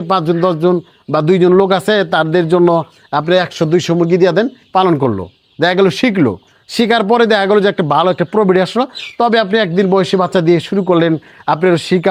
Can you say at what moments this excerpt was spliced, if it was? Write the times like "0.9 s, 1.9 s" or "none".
none